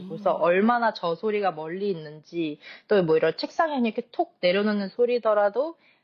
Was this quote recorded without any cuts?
yes; 0 cuts

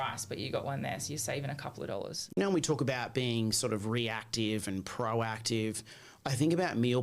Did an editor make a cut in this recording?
yes; 1 cut; at 2.4 s

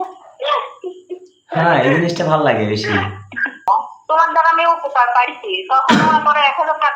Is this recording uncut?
no; 1 cut; at 3.7 s

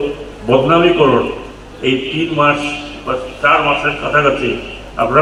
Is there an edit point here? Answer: no; 0 cuts

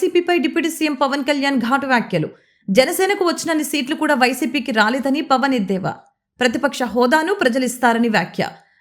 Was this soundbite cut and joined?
no; 0 cuts

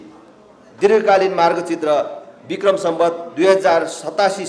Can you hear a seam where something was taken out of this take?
no; 0 cuts

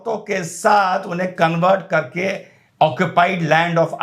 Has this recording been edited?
no; 0 cuts

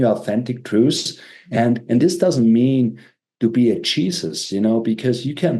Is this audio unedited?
yes; 0 cuts

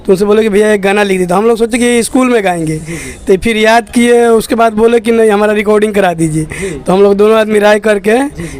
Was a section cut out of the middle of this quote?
no; 0 cuts

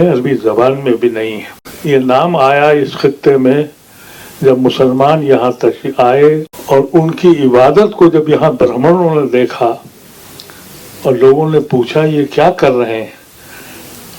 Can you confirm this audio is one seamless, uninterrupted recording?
no; 2 cuts; at 1.7 s, 6.5 s

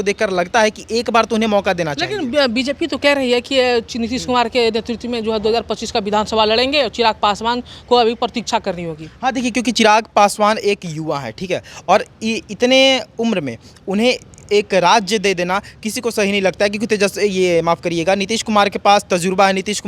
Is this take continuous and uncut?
yes; 0 cuts

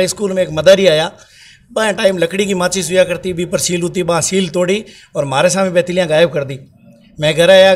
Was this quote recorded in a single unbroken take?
yes; 0 cuts

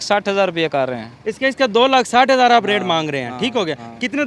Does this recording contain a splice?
no; 0 cuts

